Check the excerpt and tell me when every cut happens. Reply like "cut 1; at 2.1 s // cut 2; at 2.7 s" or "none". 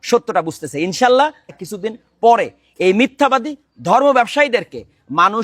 cut 1; at 1.6 s

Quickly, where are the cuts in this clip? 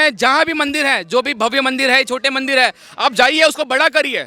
none

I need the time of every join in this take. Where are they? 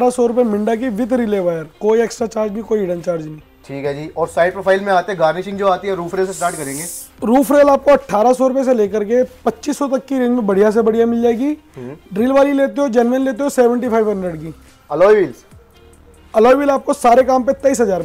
none

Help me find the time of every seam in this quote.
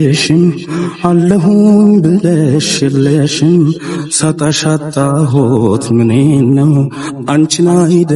none

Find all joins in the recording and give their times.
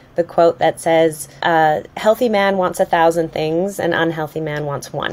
cut 1; at 1.3 s

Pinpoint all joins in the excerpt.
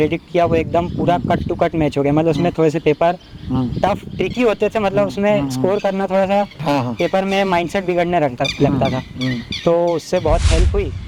none

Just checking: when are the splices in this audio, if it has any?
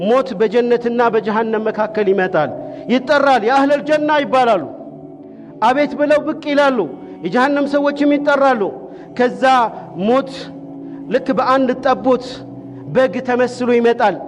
none

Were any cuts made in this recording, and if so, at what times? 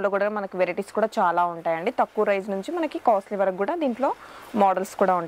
none

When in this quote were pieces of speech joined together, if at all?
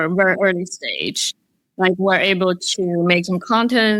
none

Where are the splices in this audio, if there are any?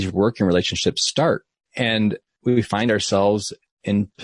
cut 1; at 2.3 s

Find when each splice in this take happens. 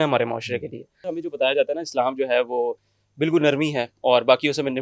cut 1; at 1.1 s

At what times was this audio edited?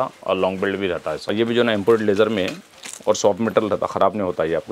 cut 1; at 1.2 s

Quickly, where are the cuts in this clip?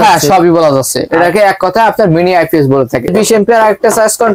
cut 1; at 3.1 s

